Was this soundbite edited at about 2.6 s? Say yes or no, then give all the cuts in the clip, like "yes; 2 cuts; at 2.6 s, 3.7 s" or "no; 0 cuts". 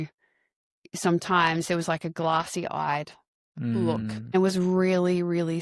no; 1 cut; at 4.3 s